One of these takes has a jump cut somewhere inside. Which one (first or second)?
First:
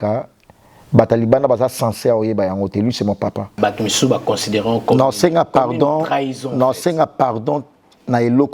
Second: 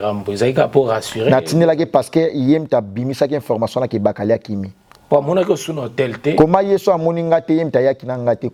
first